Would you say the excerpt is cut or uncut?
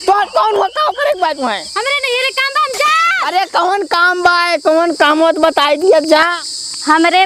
uncut